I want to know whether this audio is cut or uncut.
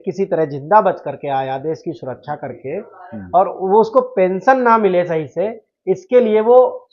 uncut